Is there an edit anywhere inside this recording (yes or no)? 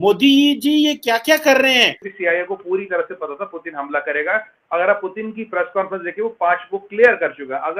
no